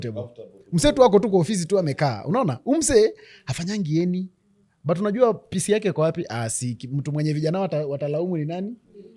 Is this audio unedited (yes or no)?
yes